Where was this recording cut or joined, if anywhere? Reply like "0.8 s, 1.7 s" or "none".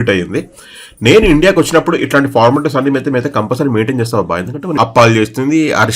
4.7 s